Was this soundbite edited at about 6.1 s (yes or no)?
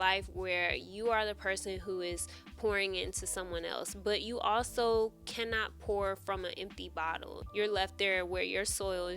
no